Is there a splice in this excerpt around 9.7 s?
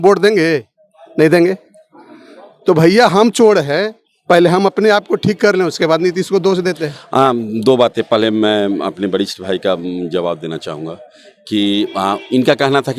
no; 1 cut; at 6.9 s

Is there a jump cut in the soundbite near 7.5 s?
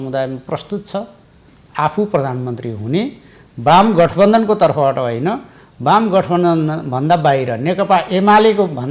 no; 1 cut; at 1.6 s

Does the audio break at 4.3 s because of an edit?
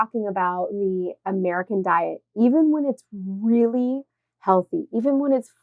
no; 0 cuts

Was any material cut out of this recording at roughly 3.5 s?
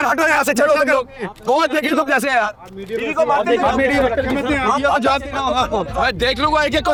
no; 0 cuts

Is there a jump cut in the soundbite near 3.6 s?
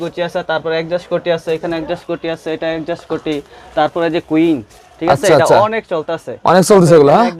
no; 0 cuts

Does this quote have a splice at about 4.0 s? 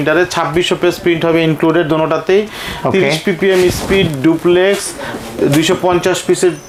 no; 0 cuts

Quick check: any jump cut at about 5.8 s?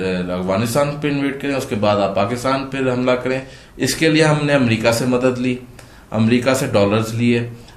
no; 1 cut; at 3.6 s

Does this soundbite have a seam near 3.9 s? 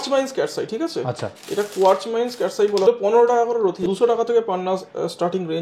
yes; 2 cuts; at 2.9 s, 3.9 s

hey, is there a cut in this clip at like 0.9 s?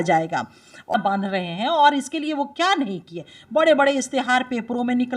yes; 1 cut; at 0.9 s

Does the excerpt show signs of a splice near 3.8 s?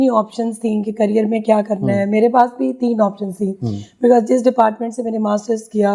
no; 0 cuts

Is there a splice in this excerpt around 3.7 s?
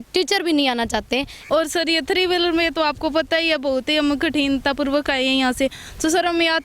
no; 1 cut; at 1.3 s

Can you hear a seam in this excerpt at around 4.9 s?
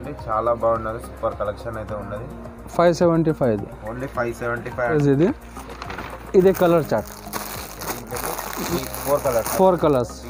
yes; 1 cut; at 4.9 s

